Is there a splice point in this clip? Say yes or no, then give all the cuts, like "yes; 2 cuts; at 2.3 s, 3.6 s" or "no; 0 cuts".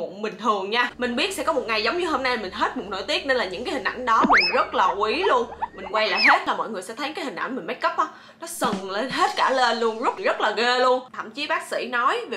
yes; 3 cuts; at 0.9 s, 6.5 s, 11.1 s